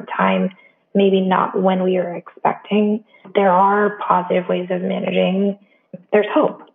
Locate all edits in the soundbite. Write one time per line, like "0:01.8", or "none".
0:03.3
0:05.8